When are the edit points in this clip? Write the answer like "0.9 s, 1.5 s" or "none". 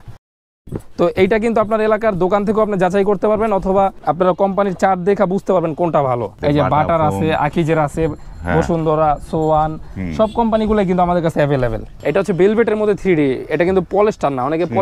4.0 s, 6.4 s, 11.9 s